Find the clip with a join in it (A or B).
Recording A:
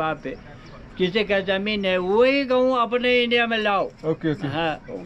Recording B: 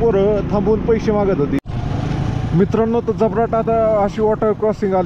B